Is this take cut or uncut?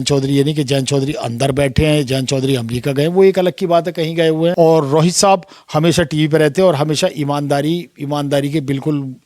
cut